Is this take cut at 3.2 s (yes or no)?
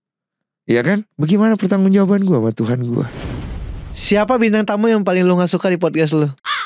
yes